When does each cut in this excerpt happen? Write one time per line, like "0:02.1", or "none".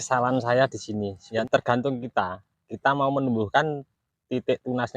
0:01.2